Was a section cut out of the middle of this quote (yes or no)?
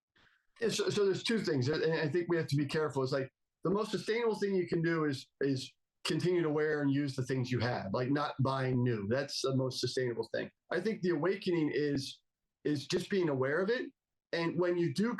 yes